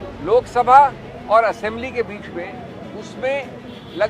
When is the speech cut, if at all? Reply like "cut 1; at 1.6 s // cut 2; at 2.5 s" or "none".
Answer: cut 1; at 1.1 s